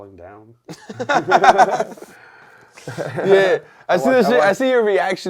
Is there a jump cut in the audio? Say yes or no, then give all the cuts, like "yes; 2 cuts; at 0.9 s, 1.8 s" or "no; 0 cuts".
no; 0 cuts